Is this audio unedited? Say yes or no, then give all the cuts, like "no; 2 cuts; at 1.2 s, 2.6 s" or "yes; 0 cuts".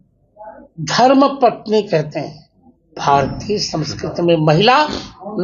no; 1 cut; at 3.0 s